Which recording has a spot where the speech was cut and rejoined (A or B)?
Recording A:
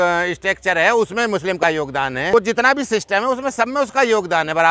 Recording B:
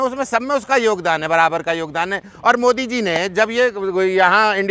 A